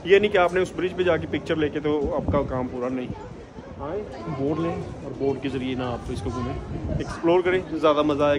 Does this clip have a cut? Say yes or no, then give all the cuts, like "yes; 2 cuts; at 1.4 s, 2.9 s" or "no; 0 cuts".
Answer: no; 0 cuts